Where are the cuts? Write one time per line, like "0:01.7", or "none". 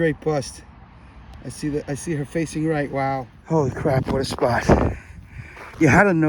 0:03.4